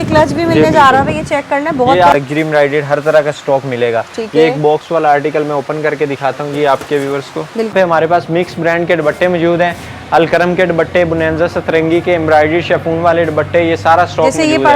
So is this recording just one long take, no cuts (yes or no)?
no